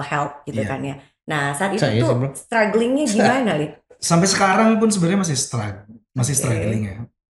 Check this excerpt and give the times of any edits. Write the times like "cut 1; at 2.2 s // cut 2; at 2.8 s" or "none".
cut 1; at 3.9 s